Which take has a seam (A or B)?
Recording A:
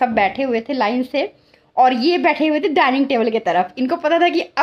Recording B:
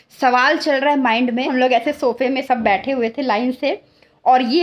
B